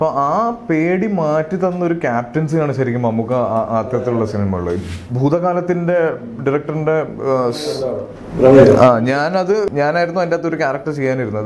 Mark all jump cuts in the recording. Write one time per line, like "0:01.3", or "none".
0:04.8
0:09.7